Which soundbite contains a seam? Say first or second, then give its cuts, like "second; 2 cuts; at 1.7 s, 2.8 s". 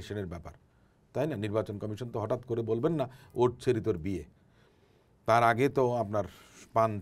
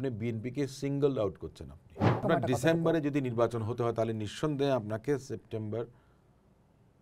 second; 1 cut; at 2.2 s